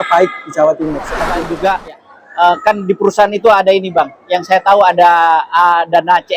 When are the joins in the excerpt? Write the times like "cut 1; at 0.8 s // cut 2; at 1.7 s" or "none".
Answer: cut 1; at 1.3 s

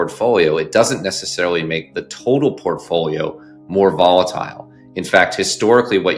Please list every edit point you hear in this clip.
none

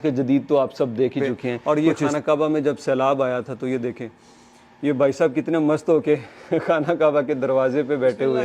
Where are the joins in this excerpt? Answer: cut 1; at 1.6 s

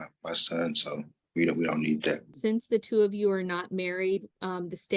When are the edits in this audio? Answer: cut 1; at 1.2 s // cut 2; at 2.3 s

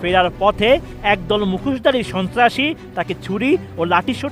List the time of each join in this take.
none

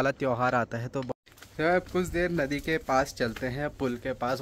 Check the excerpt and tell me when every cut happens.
cut 1; at 1.1 s

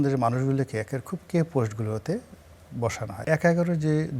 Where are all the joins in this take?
cut 1; at 3.1 s

